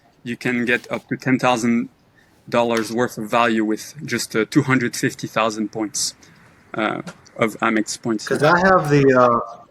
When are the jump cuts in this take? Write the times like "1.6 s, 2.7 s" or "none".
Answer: none